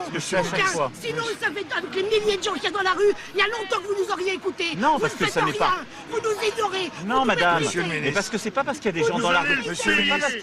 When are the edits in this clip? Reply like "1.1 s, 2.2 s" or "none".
5.3 s, 7.9 s